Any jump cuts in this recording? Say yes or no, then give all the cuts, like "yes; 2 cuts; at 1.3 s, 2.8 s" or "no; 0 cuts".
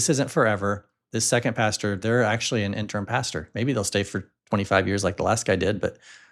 no; 0 cuts